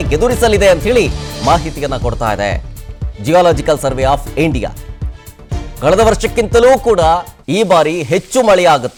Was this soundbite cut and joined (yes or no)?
no